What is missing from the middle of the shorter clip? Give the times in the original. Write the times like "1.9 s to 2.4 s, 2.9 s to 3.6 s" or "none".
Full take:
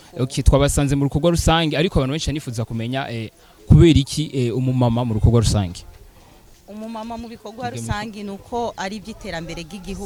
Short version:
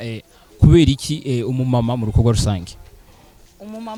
none